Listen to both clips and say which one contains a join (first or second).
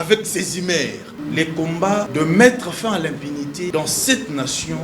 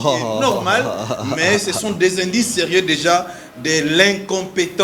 first